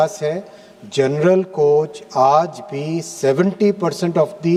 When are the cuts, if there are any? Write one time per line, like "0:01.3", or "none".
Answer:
none